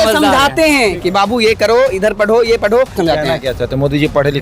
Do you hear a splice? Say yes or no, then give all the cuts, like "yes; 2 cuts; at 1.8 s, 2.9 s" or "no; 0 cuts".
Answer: yes; 1 cut; at 2.9 s